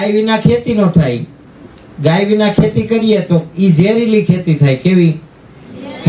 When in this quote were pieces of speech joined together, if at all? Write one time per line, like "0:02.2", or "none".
none